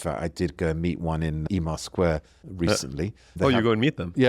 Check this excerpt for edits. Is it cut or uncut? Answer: cut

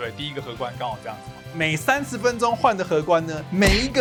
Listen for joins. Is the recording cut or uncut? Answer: uncut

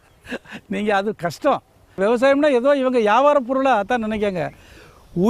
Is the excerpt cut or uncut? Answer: cut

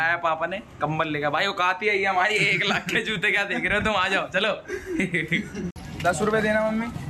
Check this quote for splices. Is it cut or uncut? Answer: uncut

